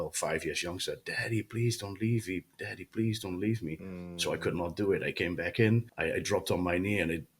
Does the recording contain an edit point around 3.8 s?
no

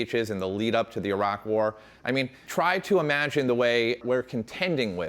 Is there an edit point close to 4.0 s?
yes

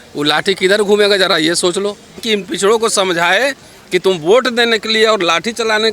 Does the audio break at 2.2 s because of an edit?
yes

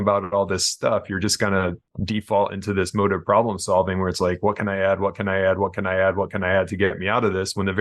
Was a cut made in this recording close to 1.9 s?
yes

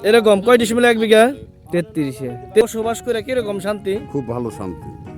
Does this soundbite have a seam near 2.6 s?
yes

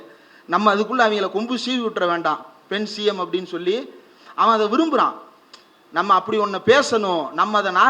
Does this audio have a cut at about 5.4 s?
no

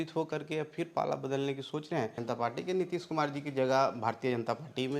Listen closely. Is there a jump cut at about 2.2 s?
yes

